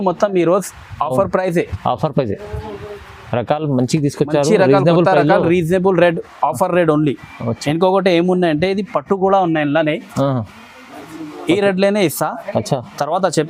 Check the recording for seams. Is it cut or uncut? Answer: uncut